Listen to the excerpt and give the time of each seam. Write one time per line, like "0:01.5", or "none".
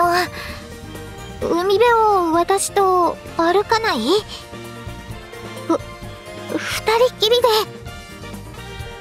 none